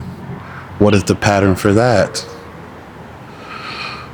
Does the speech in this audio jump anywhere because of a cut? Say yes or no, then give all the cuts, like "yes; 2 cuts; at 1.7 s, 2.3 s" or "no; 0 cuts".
no; 0 cuts